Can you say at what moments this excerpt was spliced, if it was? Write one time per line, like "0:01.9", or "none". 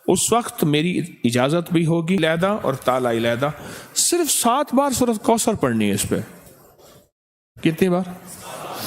0:02.2